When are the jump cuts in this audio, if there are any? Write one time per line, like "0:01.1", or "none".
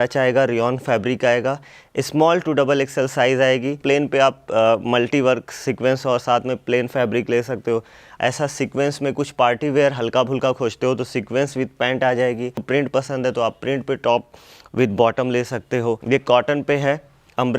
0:03.8
0:08.1
0:12.6
0:16.0